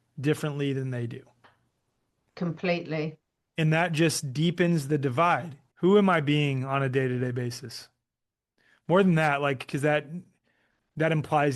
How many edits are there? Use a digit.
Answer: 1